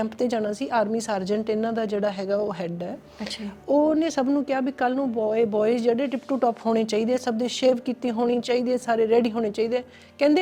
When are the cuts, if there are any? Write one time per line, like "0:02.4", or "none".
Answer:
none